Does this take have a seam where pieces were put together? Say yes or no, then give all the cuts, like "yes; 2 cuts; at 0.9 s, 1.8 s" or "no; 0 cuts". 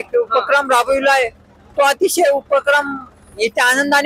no; 0 cuts